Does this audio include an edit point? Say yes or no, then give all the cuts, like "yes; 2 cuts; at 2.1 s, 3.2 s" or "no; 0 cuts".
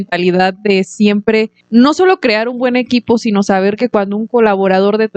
yes; 1 cut; at 1.6 s